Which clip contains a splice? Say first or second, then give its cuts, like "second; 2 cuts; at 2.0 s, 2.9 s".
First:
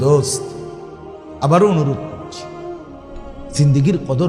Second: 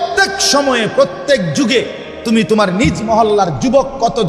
first; 2 cuts; at 2.0 s, 3.5 s